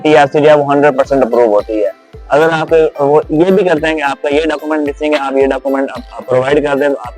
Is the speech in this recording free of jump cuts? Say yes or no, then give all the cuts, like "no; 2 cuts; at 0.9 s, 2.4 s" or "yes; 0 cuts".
yes; 0 cuts